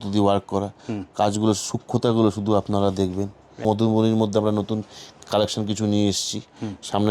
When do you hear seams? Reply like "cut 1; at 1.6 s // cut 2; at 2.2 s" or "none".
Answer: cut 1; at 3.6 s